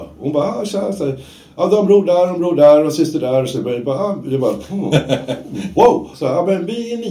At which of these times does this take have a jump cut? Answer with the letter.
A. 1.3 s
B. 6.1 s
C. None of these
B